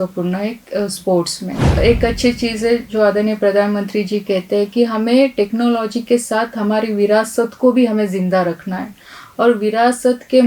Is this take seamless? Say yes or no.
no